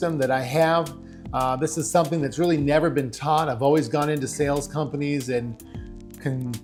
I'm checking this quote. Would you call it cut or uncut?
uncut